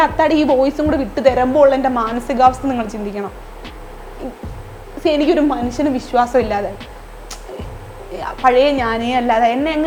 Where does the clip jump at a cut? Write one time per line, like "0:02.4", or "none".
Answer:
none